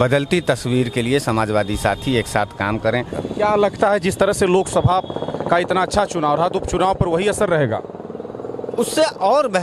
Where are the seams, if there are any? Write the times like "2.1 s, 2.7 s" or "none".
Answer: 3.2 s